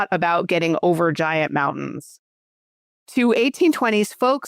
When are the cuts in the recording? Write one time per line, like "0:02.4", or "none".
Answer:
0:02.6